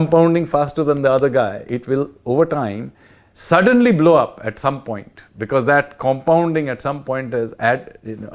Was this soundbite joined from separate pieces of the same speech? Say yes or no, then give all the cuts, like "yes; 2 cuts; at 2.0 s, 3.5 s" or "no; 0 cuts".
yes; 1 cut; at 1.6 s